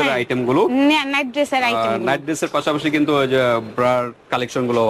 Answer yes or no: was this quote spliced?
no